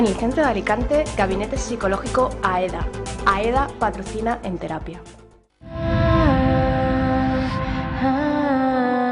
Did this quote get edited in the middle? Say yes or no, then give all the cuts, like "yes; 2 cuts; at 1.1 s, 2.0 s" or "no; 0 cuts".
no; 0 cuts